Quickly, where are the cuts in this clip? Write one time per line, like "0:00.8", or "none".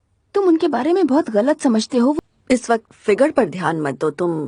0:02.2